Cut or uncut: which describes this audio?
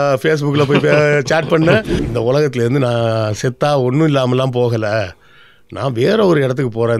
cut